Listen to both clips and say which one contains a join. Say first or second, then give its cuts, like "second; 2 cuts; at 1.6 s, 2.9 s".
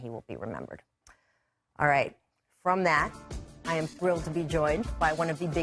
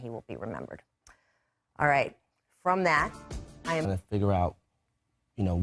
first; 1 cut; at 3.9 s